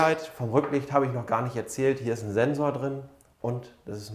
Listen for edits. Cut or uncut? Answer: uncut